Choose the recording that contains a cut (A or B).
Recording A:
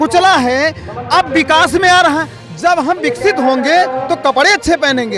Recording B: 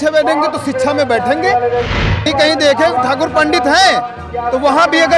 B